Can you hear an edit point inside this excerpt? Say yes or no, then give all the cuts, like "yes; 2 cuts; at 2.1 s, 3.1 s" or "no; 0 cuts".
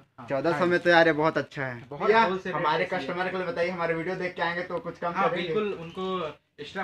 yes; 1 cut; at 2.0 s